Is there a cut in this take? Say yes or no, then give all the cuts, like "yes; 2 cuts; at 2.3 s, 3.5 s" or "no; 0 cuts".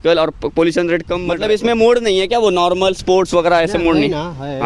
yes; 1 cut; at 1.2 s